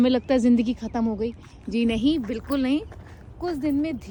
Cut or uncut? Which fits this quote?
uncut